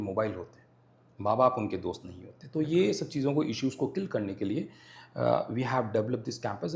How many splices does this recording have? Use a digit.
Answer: 0